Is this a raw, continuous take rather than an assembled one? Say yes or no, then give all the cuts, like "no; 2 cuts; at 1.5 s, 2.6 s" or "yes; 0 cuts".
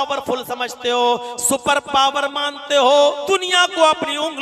no; 1 cut; at 3.2 s